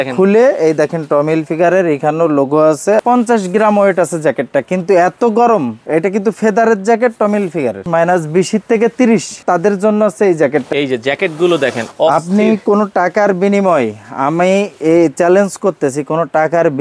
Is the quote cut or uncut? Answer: cut